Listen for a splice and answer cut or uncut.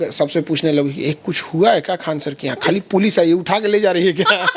uncut